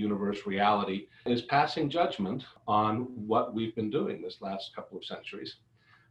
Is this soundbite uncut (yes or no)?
no